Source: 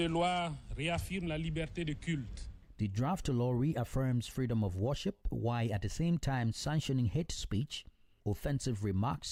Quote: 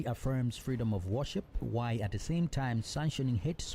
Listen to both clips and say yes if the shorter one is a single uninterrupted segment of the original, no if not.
yes